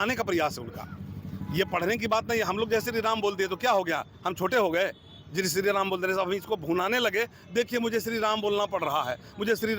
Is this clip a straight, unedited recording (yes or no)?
yes